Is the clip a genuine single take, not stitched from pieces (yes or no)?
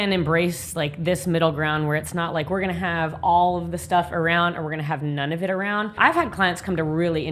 no